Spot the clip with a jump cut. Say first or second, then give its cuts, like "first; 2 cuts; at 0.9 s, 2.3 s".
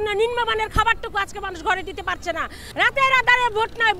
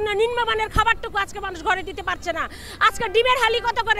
first; 1 cut; at 2.6 s